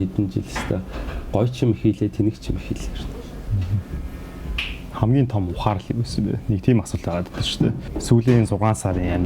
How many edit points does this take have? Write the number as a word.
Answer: one